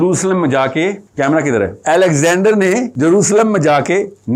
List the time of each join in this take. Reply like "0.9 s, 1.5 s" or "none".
1.0 s, 1.8 s, 2.9 s